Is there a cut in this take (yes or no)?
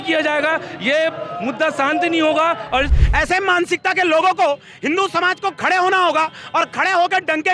yes